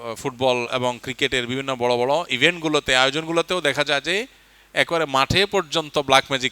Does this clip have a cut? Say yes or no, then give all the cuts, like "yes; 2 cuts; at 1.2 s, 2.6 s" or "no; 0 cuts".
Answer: no; 0 cuts